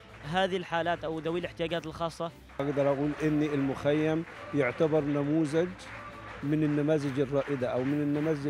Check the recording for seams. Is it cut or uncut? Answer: cut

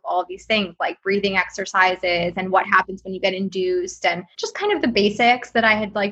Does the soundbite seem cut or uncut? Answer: cut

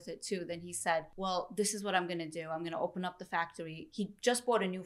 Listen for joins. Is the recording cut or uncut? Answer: cut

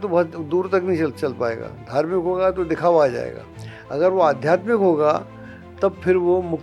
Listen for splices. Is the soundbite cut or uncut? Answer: uncut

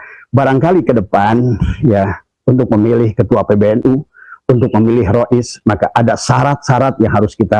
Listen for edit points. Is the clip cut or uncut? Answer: uncut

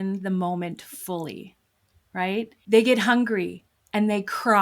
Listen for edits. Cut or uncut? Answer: cut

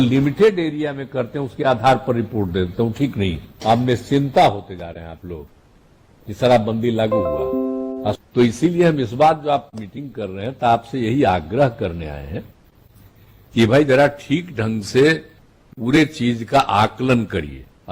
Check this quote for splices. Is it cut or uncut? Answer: cut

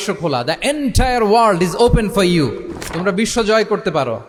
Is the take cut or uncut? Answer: uncut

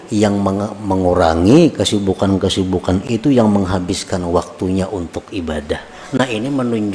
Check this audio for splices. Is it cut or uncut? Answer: cut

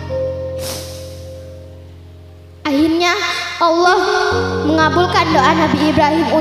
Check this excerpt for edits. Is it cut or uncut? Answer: uncut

